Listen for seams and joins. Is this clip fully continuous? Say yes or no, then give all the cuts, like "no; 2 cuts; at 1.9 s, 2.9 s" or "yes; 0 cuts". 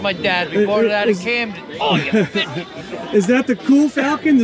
yes; 0 cuts